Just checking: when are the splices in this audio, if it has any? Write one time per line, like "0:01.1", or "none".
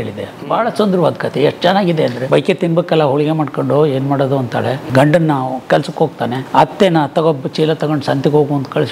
0:02.2
0:04.9
0:06.4